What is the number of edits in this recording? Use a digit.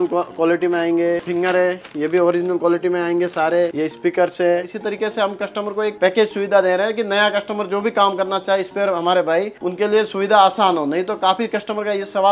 3